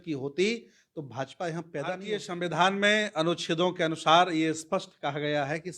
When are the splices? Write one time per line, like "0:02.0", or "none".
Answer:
0:02.2